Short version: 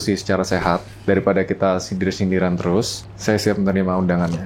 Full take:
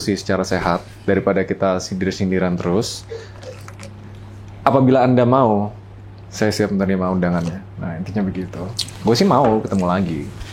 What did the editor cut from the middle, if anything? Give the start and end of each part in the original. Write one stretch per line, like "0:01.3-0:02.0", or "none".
0:03.0-0:06.2